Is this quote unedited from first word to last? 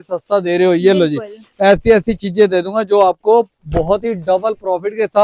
yes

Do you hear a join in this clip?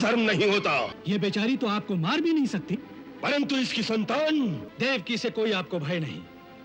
yes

